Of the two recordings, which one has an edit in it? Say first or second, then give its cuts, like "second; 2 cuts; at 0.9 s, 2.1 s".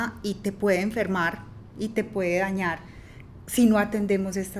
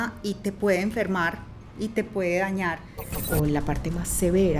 second; 1 cut; at 3.2 s